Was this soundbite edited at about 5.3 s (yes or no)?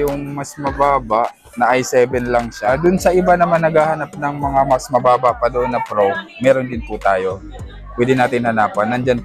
no